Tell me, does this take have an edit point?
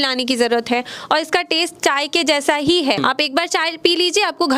yes; 1 cut; at 3.0 s

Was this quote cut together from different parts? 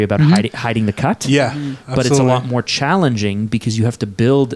no; 0 cuts

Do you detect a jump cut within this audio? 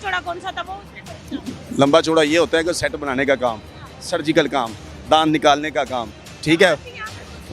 no; 0 cuts

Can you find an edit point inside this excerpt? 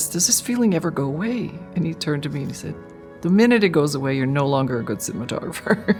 no; 0 cuts

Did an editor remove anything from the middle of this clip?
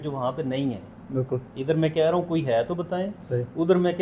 no; 0 cuts

